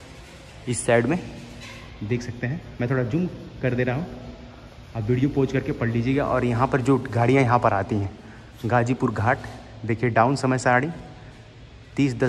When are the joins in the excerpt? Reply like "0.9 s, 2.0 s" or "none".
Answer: none